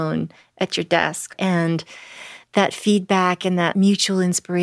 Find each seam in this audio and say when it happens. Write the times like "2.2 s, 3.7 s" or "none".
1.3 s, 3.7 s